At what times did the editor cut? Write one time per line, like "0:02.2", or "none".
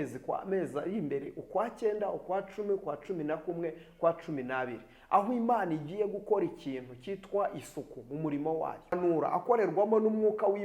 0:09.0